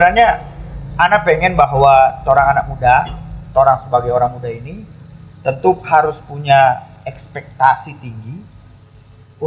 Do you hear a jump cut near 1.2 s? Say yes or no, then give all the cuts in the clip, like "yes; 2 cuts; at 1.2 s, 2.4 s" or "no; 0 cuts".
no; 0 cuts